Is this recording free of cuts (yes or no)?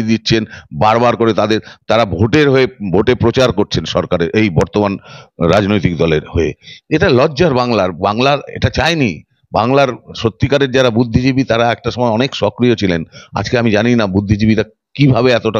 yes